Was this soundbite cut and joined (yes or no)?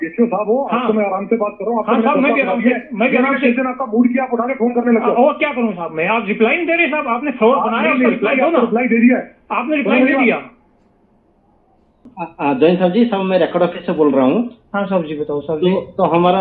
yes